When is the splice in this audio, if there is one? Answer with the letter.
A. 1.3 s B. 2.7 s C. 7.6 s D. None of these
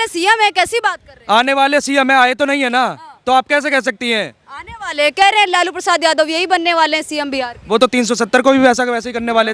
D